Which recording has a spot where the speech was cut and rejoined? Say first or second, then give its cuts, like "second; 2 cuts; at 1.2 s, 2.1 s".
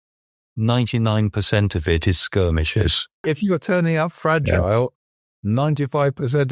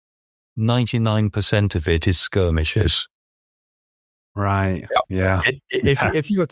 first; 1 cut; at 3.2 s